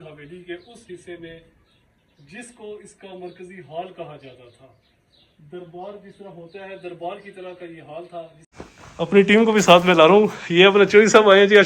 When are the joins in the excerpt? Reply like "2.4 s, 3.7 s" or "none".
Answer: 8.4 s